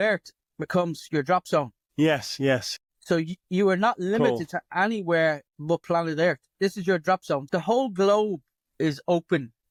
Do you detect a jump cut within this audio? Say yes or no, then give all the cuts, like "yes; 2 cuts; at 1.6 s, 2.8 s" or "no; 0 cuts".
no; 0 cuts